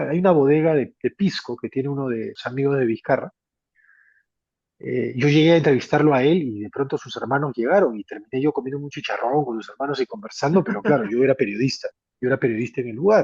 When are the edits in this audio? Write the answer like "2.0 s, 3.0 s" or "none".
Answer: 2.4 s